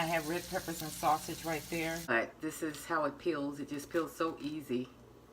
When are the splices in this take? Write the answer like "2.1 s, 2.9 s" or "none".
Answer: 2.1 s